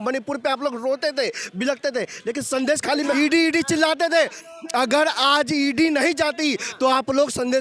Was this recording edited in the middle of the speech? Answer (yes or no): yes